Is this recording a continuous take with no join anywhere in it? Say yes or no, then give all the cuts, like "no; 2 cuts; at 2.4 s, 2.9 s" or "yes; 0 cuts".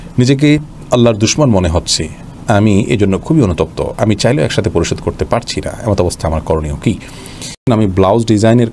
no; 1 cut; at 7.6 s